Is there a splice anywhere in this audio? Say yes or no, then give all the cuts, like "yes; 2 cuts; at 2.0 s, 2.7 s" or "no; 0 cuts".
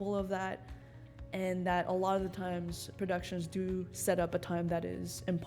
no; 0 cuts